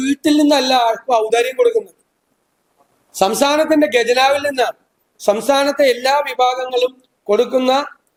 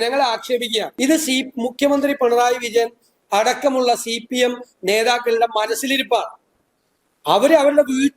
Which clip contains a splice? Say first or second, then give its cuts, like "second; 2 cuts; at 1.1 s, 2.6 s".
second; 1 cut; at 0.9 s